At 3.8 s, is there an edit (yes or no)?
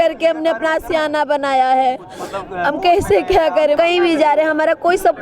yes